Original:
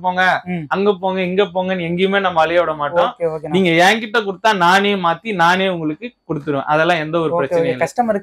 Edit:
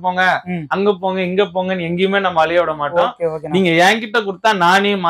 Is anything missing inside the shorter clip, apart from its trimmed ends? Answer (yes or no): no